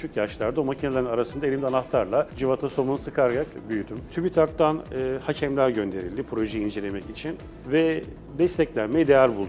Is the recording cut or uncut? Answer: cut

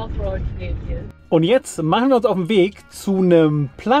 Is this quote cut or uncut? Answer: cut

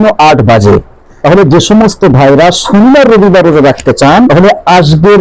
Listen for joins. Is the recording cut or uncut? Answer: cut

